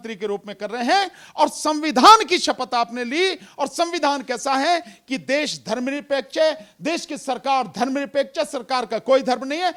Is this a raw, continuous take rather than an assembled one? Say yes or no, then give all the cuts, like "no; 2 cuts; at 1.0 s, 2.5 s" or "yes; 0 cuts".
yes; 0 cuts